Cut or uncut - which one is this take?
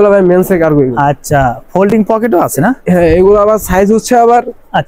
uncut